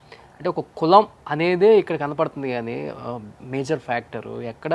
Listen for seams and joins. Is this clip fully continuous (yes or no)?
no